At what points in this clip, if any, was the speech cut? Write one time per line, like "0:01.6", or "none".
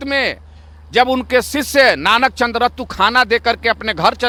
none